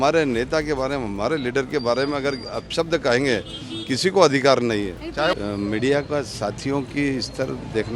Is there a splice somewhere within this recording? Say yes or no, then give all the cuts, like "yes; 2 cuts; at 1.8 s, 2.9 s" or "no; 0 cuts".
yes; 1 cut; at 5.4 s